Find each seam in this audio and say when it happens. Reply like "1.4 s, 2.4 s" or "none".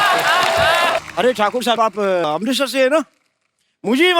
1.0 s